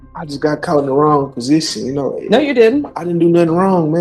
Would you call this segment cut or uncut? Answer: uncut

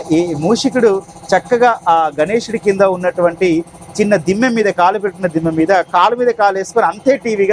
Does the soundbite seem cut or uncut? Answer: uncut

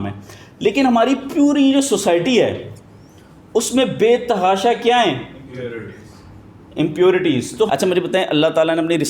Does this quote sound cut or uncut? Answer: cut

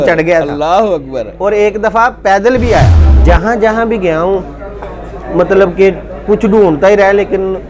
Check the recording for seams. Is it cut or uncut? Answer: cut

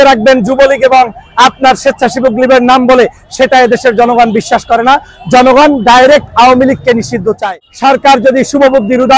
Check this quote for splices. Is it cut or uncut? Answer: cut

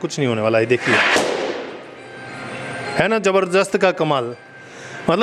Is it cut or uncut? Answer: uncut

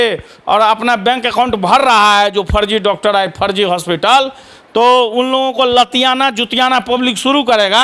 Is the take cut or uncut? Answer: uncut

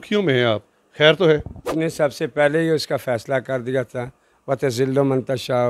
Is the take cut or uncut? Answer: cut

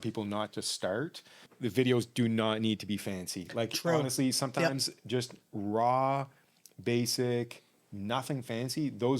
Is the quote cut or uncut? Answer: cut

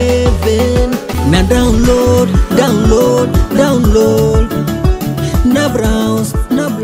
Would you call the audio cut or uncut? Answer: uncut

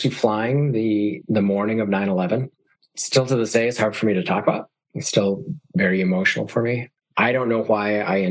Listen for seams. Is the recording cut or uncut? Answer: cut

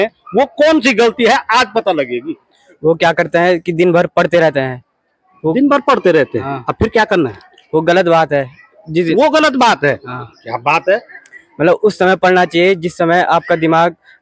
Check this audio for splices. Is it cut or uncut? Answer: uncut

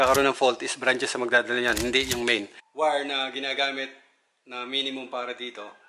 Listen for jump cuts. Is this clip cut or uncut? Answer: cut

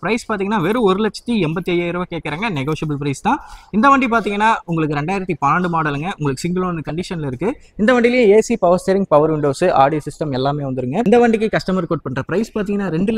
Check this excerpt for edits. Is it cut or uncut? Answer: uncut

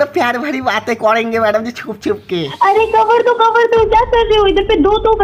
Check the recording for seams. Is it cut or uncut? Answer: uncut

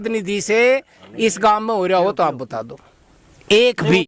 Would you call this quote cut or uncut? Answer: uncut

